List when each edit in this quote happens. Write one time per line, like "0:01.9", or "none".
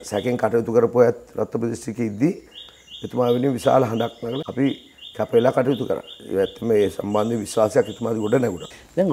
none